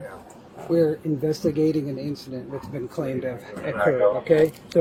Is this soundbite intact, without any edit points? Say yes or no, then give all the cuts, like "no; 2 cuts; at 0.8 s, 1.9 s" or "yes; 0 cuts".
yes; 0 cuts